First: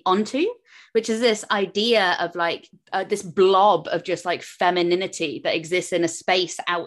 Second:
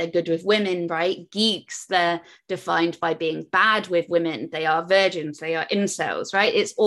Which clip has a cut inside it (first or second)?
first